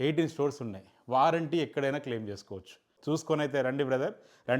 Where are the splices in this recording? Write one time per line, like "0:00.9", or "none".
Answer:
0:02.9